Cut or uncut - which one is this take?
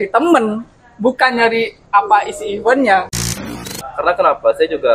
cut